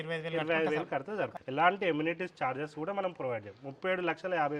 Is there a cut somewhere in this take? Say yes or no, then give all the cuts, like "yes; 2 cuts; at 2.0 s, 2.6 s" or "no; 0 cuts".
yes; 1 cut; at 1.4 s